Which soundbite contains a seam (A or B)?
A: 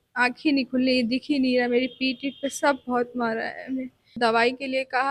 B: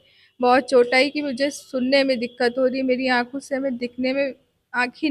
A